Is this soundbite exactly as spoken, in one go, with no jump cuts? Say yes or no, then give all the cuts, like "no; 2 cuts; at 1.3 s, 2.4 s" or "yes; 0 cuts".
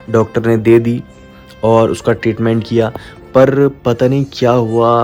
yes; 0 cuts